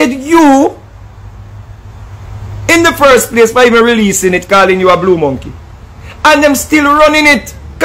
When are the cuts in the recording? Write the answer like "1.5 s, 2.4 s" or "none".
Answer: none

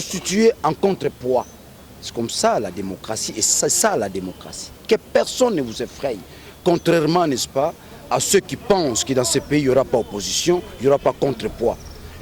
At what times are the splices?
none

